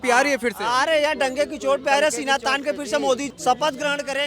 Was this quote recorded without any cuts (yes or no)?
no